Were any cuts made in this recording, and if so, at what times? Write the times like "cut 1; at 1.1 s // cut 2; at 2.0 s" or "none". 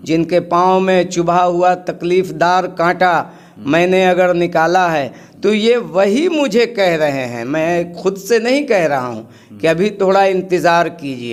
none